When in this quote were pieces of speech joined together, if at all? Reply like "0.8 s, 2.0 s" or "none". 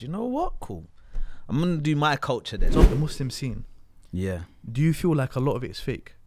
2.9 s